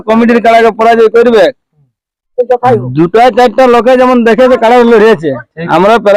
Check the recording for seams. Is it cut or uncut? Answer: uncut